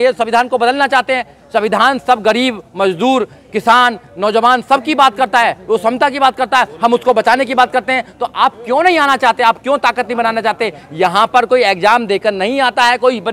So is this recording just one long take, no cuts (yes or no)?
yes